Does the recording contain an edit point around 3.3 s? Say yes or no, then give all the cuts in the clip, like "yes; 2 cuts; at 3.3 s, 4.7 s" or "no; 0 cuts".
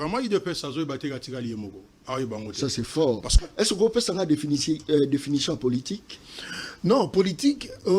yes; 1 cut; at 3.3 s